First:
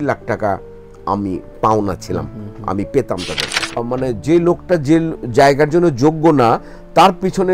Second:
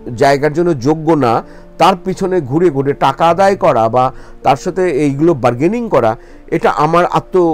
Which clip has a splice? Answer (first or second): first